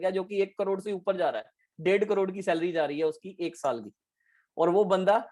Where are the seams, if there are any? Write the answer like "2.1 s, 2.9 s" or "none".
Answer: none

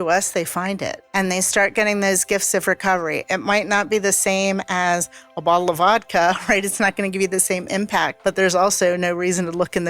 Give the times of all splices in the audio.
1.0 s, 8.1 s

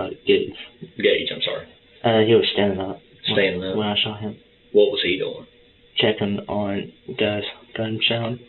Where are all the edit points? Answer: none

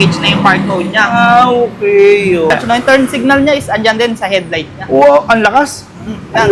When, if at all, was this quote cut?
2.5 s

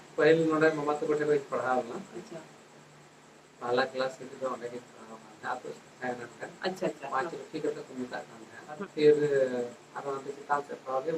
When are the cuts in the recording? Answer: 8.8 s

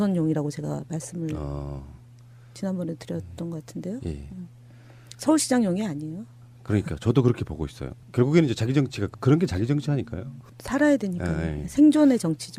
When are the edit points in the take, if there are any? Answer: none

